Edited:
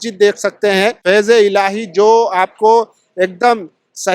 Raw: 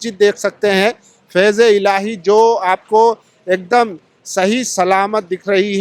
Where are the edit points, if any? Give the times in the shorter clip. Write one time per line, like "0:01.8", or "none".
0:01.0